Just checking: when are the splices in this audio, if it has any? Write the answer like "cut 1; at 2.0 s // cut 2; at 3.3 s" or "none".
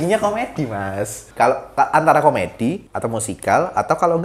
cut 1; at 1.2 s // cut 2; at 2.9 s